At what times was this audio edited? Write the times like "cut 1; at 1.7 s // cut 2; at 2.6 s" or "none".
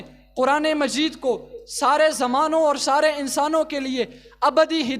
none